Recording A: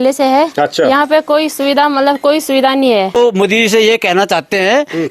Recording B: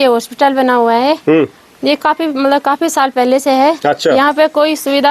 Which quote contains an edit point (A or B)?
A